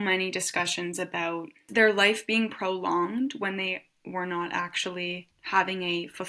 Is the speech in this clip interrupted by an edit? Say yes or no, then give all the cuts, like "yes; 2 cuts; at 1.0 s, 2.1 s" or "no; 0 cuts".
yes; 2 cuts; at 1.7 s, 5.3 s